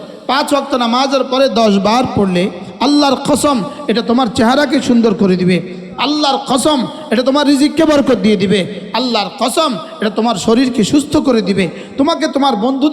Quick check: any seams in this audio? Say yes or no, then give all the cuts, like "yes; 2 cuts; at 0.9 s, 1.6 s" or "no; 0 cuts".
yes; 1 cut; at 2.7 s